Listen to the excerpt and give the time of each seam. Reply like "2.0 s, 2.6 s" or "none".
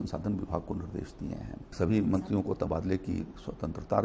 1.7 s

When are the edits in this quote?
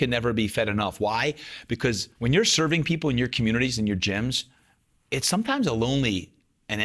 2.1 s

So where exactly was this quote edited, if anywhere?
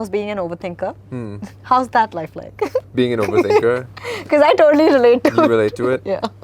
none

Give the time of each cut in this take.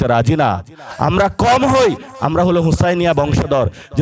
none

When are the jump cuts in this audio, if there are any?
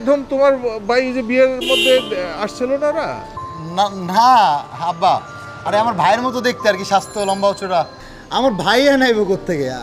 none

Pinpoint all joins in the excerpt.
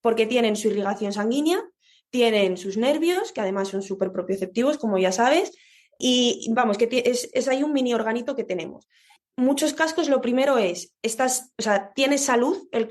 9.1 s

